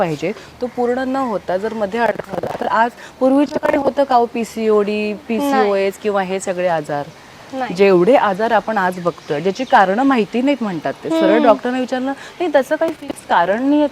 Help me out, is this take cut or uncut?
uncut